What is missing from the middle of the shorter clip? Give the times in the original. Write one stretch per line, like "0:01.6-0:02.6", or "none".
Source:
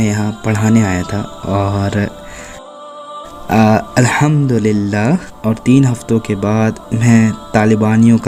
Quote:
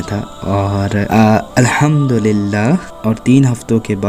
0:02.1-0:03.5